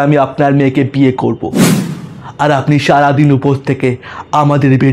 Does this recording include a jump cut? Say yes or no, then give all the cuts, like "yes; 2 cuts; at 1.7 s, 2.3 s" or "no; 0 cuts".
no; 0 cuts